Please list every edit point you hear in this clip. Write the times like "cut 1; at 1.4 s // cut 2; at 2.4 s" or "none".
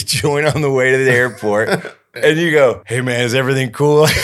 cut 1; at 2.1 s // cut 2; at 2.9 s